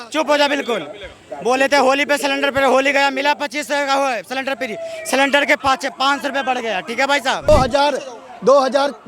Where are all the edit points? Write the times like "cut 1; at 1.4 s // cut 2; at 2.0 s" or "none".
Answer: cut 1; at 7.5 s